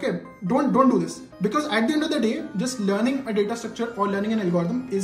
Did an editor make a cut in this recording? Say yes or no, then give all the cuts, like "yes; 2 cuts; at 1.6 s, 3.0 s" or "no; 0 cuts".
no; 0 cuts